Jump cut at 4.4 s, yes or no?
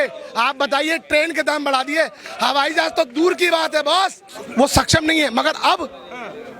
yes